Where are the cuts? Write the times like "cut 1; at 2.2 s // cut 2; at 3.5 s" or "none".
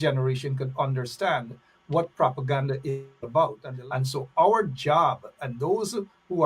cut 1; at 3.7 s